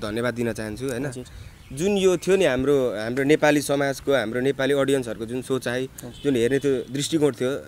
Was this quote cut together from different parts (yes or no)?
no